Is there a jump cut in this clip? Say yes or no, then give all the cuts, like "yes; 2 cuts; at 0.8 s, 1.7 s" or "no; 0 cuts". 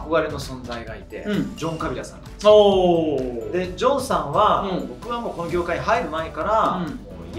no; 0 cuts